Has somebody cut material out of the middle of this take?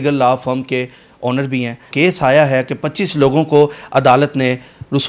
yes; 1 cut; at 1.9 s

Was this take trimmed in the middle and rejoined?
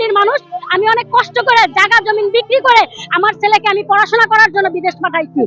no; 0 cuts

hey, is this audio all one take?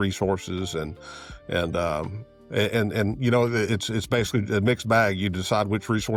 yes; 0 cuts

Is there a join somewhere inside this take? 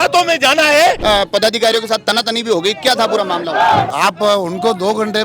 yes; 2 cuts; at 1.0 s, 3.9 s

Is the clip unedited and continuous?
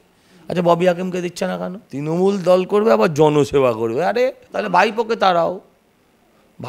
no; 2 cuts; at 1.8 s, 4.5 s

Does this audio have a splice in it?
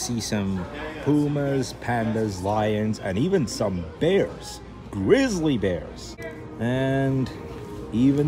no; 0 cuts

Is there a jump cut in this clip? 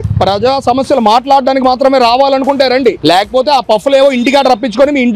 no; 0 cuts

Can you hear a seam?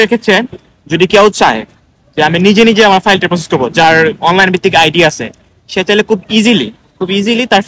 no; 0 cuts

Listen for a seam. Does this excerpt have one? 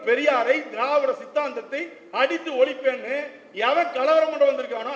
no; 0 cuts

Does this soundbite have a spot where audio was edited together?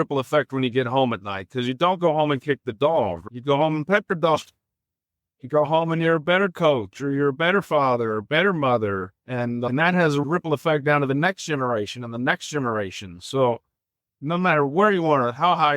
yes; 2 cuts; at 3.2 s, 10.2 s

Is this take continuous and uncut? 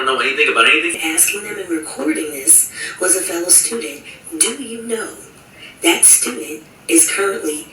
no; 1 cut; at 0.9 s

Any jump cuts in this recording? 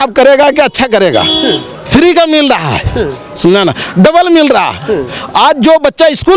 no; 0 cuts

